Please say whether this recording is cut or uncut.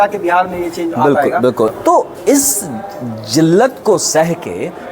cut